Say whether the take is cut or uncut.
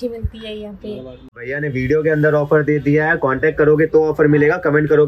cut